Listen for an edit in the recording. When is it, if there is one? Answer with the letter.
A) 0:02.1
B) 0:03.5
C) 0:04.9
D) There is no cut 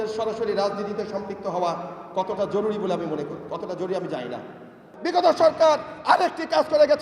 C